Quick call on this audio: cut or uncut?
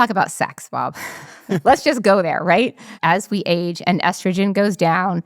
cut